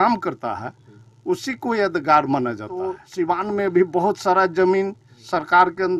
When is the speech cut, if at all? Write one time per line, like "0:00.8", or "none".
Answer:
0:03.0

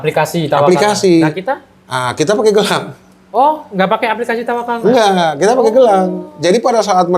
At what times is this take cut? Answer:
none

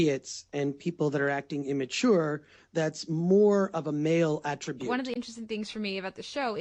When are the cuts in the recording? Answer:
0:04.9

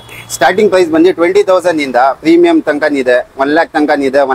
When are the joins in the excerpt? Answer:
none

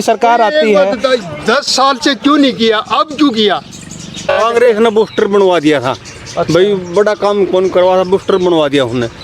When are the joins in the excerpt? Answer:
0:04.3

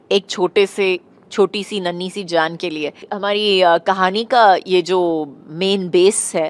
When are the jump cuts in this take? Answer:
0:03.1

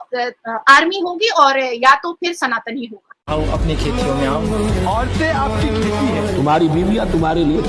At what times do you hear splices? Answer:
0:03.2

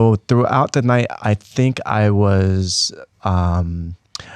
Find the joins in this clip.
none

